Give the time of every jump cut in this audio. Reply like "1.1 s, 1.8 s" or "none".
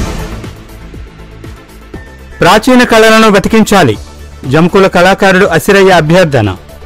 2.2 s